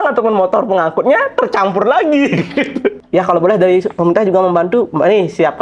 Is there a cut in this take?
yes; 1 cut; at 3.0 s

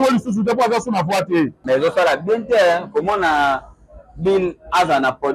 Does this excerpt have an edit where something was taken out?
yes; 1 cut; at 1.6 s

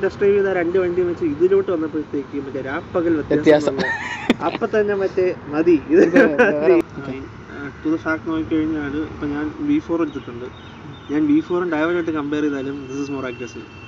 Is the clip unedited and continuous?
no; 1 cut; at 6.9 s

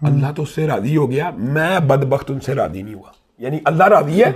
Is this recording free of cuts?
yes; 0 cuts

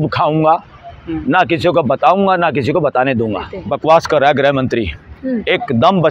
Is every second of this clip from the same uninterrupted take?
no; 1 cut; at 3.6 s

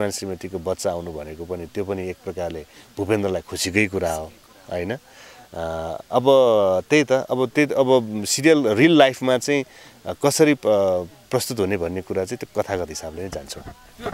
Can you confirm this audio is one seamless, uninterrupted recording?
yes; 0 cuts

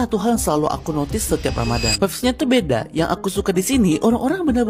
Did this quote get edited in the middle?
no; 0 cuts

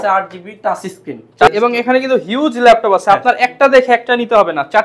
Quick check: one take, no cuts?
no; 1 cut; at 1.5 s

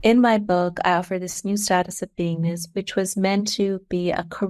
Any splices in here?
no; 0 cuts

